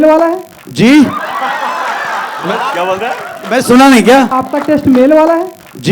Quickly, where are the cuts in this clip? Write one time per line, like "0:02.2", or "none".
0:04.3

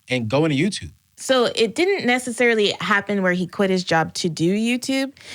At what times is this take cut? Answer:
0:01.1

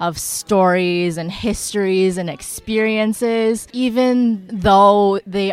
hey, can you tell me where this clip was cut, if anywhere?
0:03.7
0:04.5

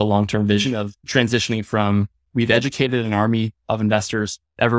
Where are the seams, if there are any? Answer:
0:01.0
0:02.2

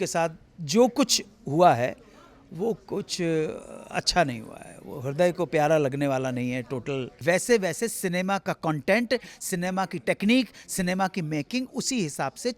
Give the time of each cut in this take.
0:07.1

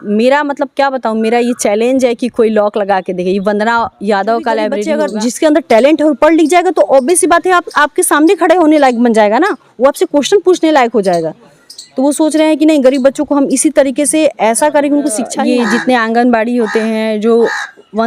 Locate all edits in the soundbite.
0:04.8
0:15.4

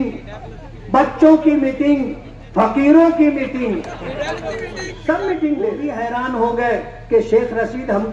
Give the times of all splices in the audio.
0:05.8

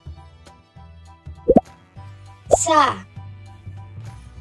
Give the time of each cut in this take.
0:03.5

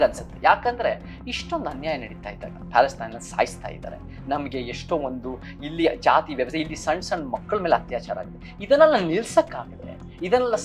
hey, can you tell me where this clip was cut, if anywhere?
none

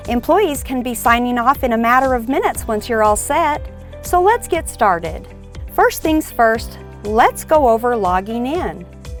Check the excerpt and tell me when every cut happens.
none

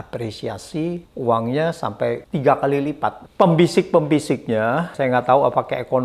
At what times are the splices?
0:01.1
0:02.3
0:03.2
0:04.9

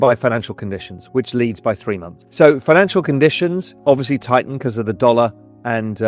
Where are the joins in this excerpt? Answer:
0:03.7

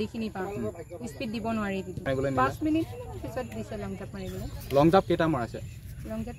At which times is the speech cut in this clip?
0:02.1

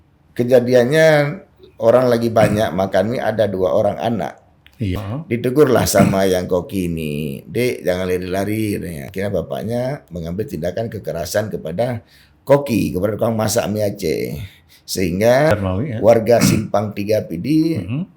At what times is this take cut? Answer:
0:04.9
0:09.0
0:15.5

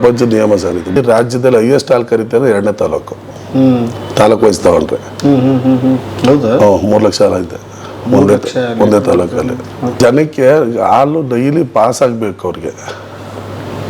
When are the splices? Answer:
0:01.0
0:10.0

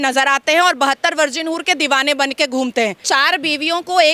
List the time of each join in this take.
0:03.0

